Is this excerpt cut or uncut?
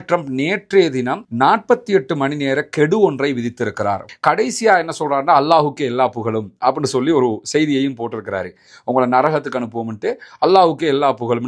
cut